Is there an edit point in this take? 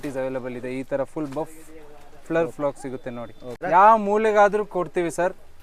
yes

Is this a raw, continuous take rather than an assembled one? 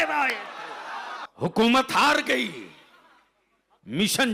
no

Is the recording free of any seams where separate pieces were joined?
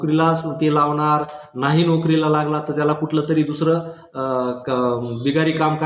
yes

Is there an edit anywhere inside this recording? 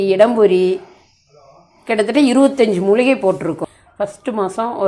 yes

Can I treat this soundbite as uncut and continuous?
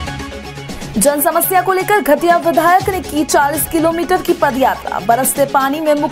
yes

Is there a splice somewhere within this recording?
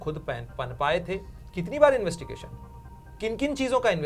yes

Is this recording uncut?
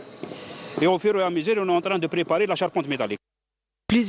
no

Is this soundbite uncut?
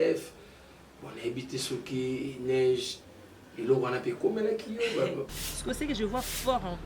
no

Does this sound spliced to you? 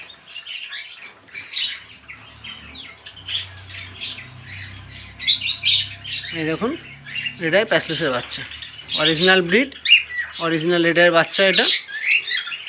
no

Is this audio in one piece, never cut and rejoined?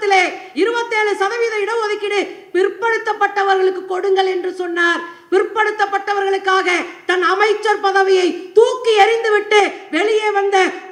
yes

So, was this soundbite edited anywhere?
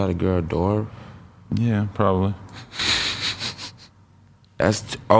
no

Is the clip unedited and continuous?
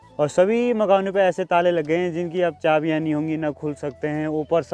yes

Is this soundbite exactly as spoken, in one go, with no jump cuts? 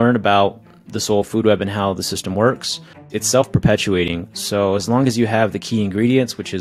no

